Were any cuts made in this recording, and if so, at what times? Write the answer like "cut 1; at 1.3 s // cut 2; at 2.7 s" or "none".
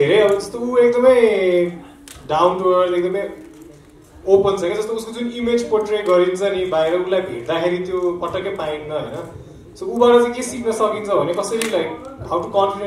none